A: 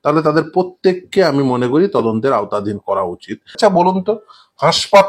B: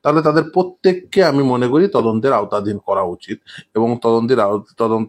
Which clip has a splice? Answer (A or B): A